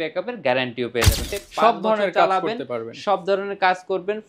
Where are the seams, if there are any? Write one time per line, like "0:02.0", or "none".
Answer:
0:01.3